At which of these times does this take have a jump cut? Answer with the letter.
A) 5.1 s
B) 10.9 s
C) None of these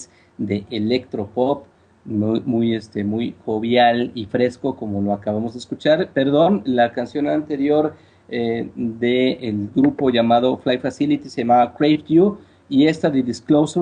B